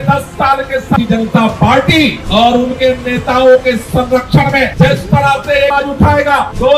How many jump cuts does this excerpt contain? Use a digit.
2